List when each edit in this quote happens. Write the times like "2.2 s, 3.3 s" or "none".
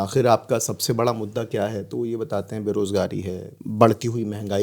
3.6 s